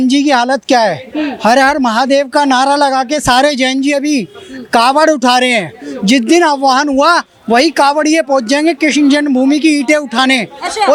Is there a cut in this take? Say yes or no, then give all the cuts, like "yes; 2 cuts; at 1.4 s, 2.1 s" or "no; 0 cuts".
no; 0 cuts